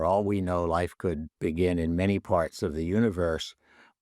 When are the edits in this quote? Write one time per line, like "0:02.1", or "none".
0:01.3